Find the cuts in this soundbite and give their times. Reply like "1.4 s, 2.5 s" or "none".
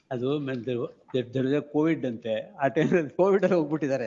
none